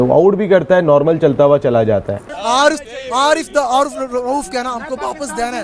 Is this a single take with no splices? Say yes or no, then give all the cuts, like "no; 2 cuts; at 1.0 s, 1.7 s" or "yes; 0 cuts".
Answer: no; 1 cut; at 2.3 s